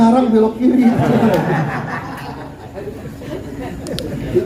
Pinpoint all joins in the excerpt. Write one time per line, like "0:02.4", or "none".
none